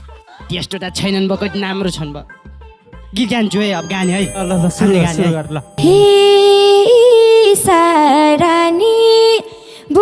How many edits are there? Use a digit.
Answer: 1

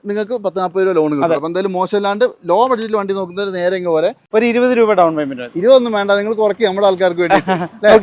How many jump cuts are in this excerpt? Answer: 1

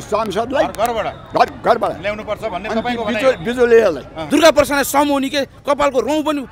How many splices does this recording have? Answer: 1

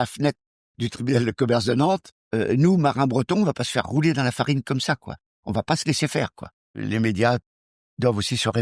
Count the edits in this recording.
2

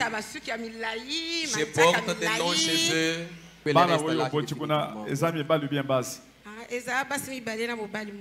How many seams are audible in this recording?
1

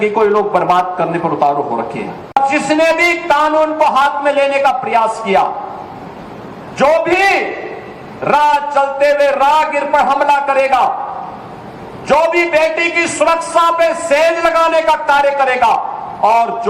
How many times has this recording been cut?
1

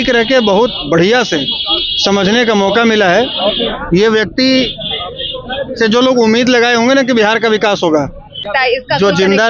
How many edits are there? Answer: 1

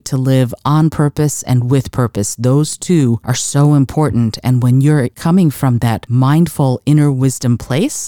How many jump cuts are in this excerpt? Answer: 1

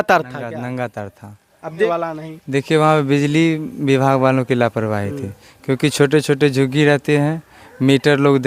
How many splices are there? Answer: 1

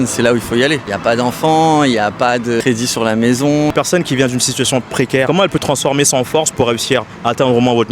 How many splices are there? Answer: 4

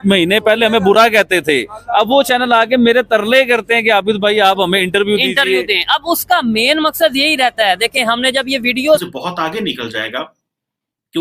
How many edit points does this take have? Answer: 1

